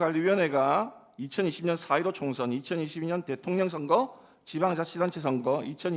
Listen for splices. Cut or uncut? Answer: uncut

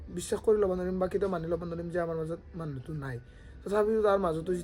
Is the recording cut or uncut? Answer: uncut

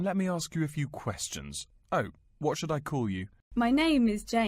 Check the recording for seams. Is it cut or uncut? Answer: cut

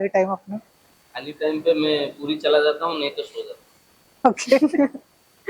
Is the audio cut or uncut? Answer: uncut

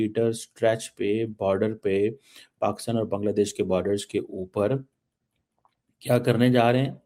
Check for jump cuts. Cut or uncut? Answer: uncut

